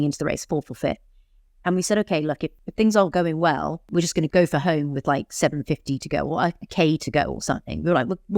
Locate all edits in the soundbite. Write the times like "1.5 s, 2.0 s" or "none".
2.6 s, 4.2 s